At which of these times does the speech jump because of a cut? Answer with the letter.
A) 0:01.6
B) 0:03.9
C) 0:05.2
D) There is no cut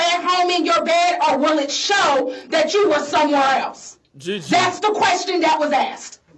D